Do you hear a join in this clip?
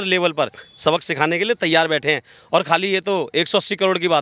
no; 0 cuts

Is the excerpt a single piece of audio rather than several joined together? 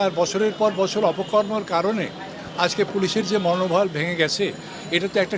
yes; 0 cuts

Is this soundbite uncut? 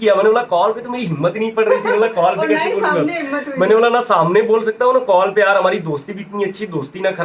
yes; 0 cuts

